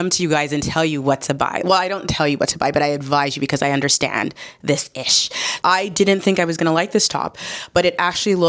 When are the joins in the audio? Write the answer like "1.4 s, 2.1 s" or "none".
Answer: 5.5 s